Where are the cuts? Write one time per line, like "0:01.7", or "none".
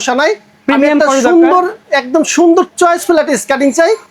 none